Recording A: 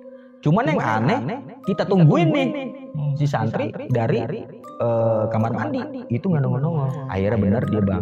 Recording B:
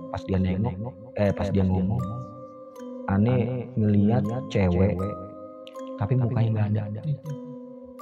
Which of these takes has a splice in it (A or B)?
A